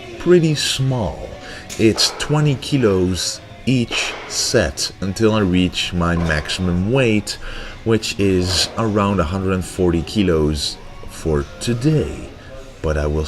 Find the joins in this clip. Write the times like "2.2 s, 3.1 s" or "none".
9.4 s